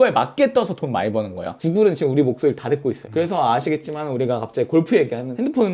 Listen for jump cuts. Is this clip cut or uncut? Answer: cut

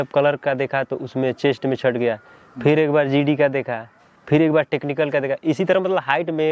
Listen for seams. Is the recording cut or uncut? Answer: uncut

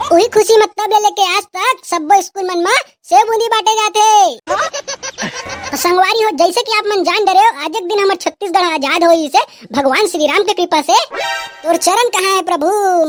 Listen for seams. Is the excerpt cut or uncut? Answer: uncut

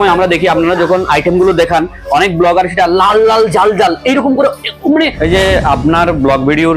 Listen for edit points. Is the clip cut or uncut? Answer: cut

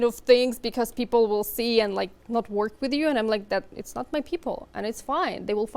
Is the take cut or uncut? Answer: uncut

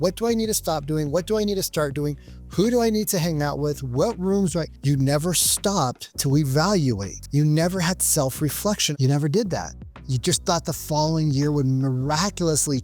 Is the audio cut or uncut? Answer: cut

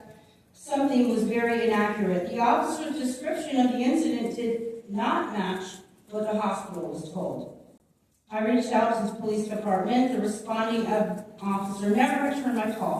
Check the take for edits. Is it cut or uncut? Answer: uncut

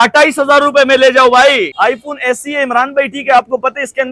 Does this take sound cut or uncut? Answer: cut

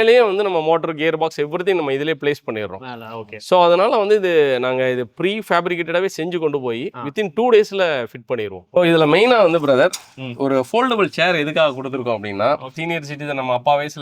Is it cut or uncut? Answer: cut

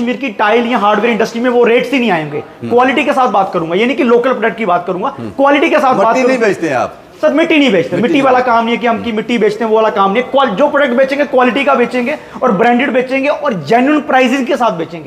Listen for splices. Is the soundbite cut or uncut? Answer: uncut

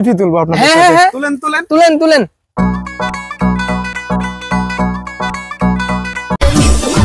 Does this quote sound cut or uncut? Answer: uncut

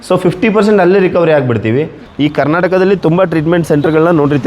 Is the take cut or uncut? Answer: cut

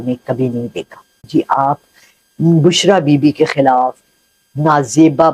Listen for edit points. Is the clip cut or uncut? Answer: cut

